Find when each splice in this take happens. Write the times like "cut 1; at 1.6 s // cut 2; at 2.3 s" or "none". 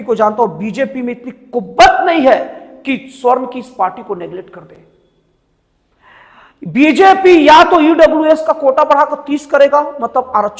none

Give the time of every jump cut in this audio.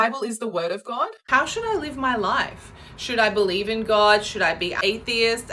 cut 1; at 1.2 s

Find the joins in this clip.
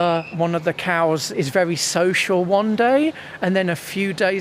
cut 1; at 1.3 s

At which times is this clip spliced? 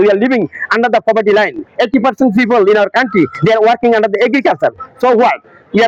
none

